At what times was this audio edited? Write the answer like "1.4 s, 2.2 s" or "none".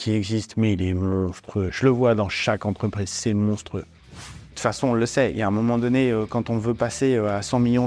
4.2 s